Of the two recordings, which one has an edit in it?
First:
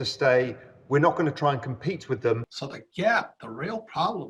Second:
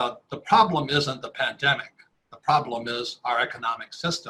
first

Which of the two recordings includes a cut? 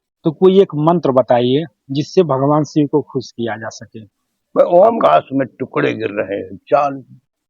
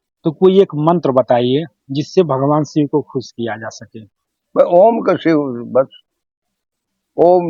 first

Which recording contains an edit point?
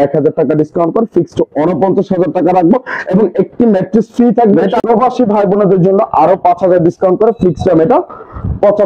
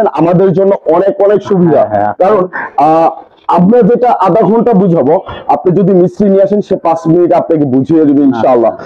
first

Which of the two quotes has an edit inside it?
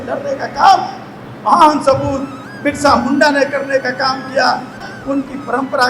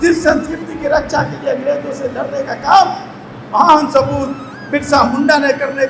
first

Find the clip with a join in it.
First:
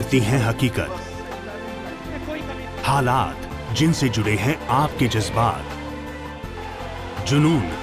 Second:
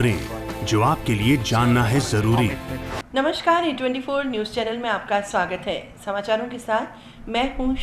second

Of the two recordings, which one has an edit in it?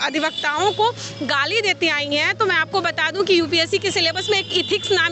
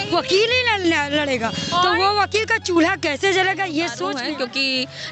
second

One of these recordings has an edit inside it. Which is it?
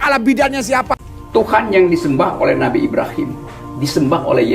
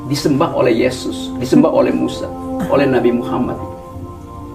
first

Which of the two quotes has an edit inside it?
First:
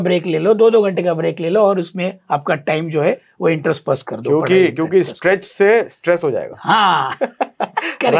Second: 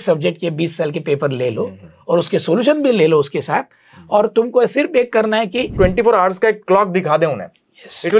second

